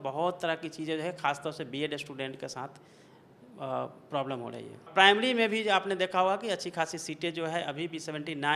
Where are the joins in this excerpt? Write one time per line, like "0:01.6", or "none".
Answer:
0:04.9